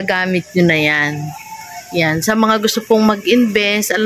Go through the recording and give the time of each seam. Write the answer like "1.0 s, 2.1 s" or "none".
none